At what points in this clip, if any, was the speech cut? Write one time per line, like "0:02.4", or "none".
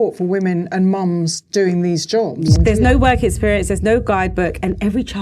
0:02.6